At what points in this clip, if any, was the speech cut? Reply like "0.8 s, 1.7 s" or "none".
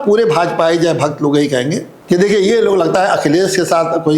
1.9 s